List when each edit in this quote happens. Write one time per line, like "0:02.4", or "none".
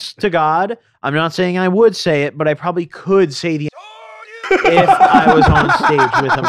none